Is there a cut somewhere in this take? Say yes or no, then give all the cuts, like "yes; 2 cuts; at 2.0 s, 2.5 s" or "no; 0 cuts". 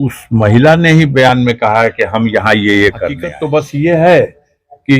yes; 1 cut; at 3.3 s